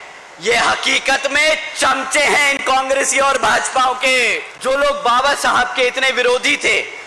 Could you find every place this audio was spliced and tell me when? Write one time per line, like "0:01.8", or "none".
0:04.4